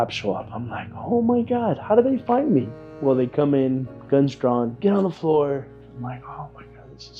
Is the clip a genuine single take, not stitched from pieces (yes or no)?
yes